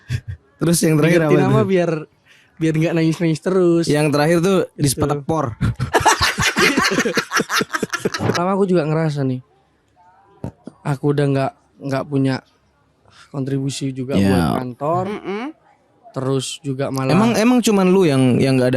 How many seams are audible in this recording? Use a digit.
1